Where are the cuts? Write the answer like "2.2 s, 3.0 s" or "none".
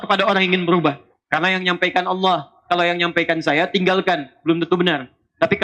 1.1 s